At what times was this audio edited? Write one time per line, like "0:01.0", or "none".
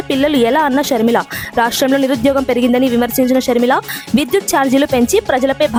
none